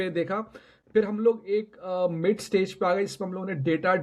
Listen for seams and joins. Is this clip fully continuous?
yes; 0 cuts

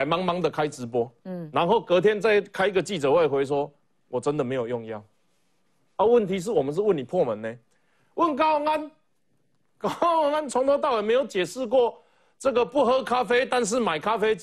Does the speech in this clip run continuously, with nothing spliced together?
yes; 0 cuts

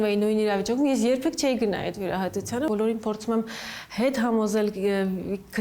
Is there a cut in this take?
yes; 1 cut; at 2.7 s

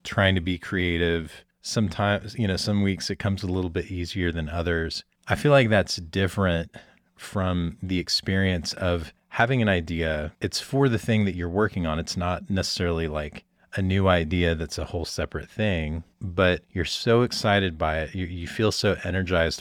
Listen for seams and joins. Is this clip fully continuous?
yes; 0 cuts

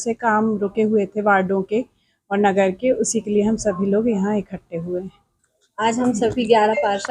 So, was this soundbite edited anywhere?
no; 0 cuts

